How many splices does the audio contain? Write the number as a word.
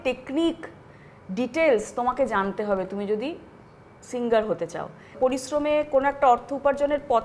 one